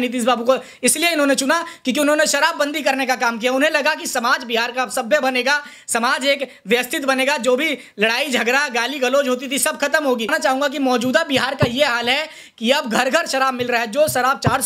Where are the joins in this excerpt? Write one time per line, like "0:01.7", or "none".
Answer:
0:10.3